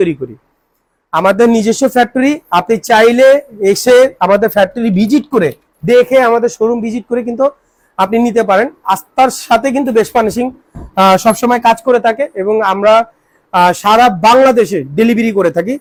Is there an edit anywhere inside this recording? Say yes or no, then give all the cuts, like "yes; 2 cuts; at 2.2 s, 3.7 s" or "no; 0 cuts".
no; 0 cuts